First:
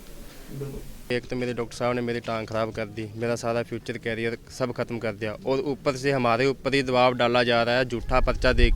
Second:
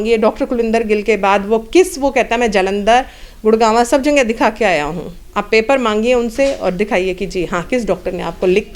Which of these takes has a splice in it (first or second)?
first